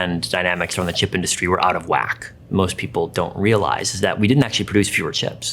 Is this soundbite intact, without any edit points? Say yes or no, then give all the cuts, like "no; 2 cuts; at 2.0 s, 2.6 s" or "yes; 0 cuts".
no; 1 cut; at 2.4 s